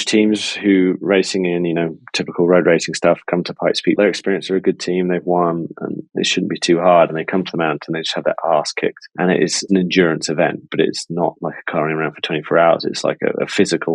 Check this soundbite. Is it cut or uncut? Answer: uncut